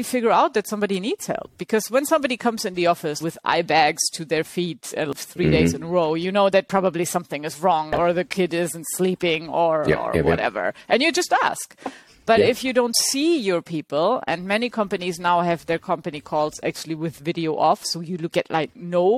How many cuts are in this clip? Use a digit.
3